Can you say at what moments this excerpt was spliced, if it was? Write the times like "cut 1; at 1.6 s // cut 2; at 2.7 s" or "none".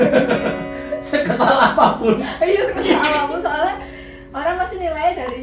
none